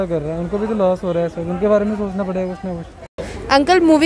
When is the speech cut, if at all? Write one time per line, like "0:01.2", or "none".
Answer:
0:03.1